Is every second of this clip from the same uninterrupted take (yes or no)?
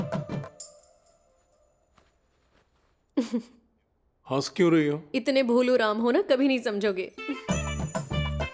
no